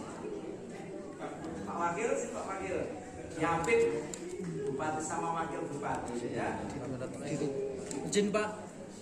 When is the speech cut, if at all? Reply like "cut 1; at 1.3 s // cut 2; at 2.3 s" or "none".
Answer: none